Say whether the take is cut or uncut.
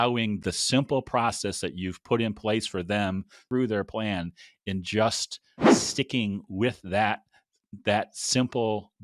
cut